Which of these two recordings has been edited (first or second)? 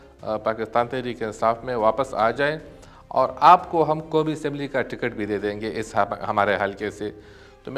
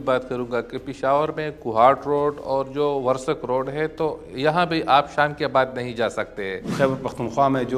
second